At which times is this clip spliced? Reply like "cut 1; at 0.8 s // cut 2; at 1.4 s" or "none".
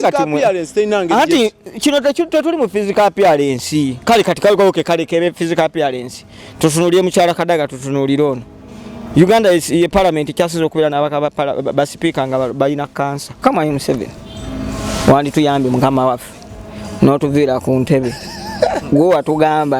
cut 1; at 13.4 s